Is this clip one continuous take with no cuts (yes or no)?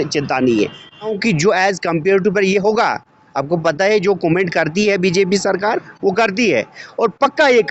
no